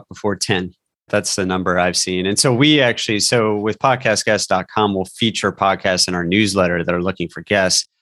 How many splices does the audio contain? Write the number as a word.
one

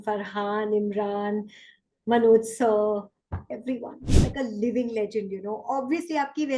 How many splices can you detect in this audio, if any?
one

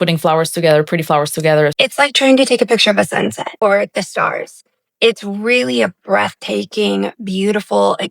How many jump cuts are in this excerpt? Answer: two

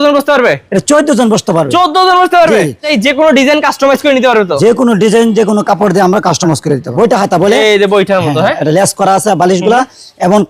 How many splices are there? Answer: two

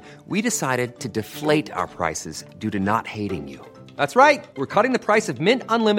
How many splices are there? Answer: zero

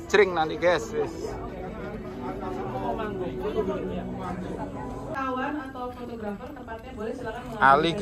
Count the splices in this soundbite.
zero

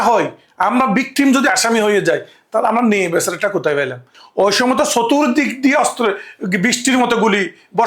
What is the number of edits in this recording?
one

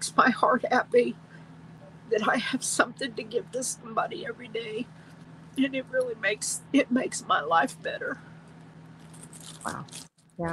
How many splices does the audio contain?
zero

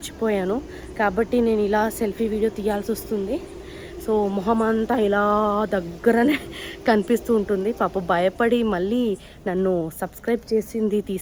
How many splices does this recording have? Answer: zero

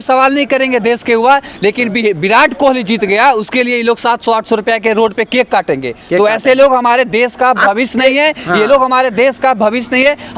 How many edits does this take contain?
zero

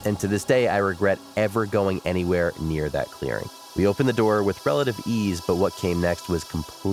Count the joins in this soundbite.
one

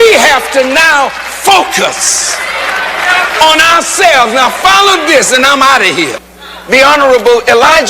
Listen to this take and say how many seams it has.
one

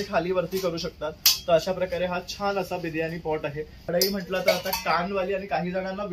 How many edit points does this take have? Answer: one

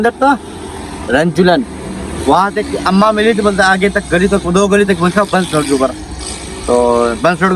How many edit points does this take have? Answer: zero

